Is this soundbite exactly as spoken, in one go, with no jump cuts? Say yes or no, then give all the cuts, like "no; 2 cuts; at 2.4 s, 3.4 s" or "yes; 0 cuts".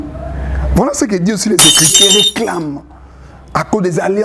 no; 1 cut; at 1.9 s